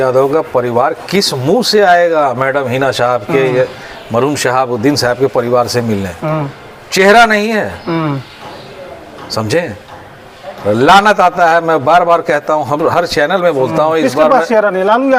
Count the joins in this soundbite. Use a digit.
0